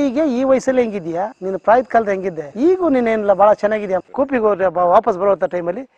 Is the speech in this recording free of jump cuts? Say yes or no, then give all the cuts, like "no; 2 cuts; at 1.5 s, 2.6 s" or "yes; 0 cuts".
no; 1 cut; at 4.1 s